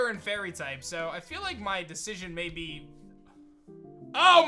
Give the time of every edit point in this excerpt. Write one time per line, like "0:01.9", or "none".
none